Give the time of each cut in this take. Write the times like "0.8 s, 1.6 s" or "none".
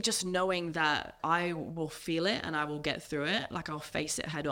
1.1 s